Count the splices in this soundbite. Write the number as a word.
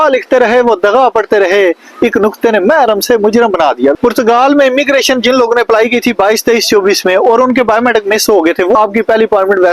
two